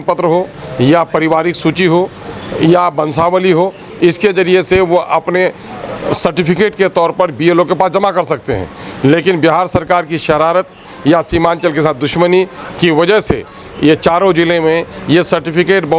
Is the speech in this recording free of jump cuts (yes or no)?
yes